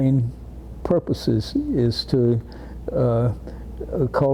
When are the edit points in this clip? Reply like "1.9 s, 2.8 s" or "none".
none

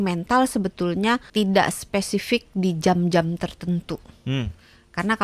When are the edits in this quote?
1.3 s

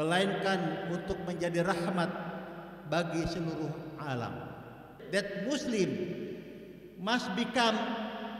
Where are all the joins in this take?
4.9 s

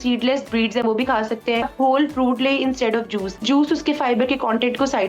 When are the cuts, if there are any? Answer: 1.7 s, 3.4 s

